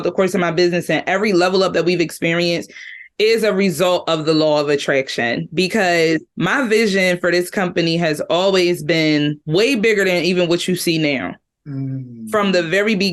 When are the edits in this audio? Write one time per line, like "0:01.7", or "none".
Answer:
0:06.3